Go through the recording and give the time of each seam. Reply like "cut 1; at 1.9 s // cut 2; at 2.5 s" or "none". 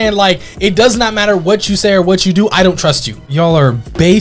cut 1; at 3.3 s